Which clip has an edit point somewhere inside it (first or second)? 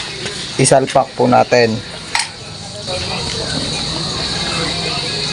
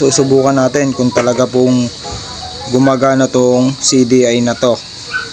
first